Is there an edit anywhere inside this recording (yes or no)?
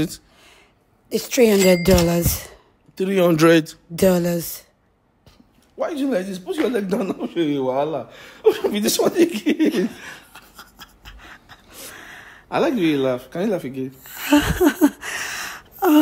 no